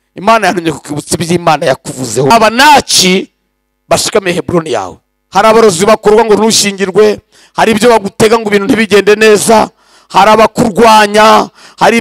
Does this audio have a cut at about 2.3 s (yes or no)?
yes